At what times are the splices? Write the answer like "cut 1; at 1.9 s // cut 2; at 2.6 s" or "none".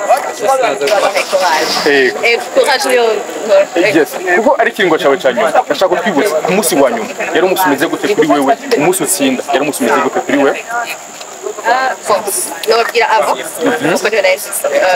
none